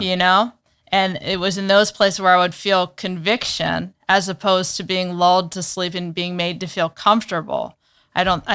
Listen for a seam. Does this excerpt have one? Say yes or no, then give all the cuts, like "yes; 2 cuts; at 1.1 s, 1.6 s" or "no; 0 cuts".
no; 0 cuts